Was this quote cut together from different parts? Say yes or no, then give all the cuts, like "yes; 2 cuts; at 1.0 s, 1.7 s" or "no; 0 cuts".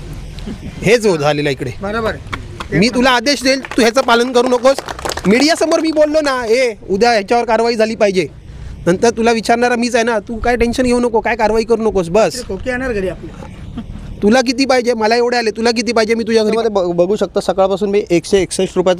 yes; 1 cut; at 16.5 s